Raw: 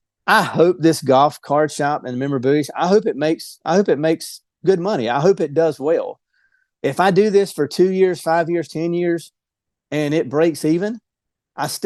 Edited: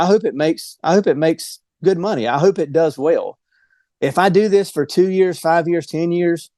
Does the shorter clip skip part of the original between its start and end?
no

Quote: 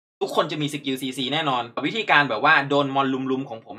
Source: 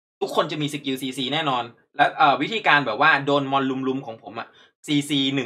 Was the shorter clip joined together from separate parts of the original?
yes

